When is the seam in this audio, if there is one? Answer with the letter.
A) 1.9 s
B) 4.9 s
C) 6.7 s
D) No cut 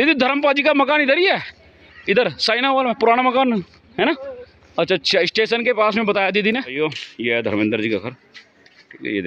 C